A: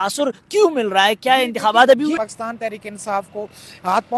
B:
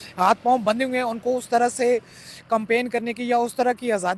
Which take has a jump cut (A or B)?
A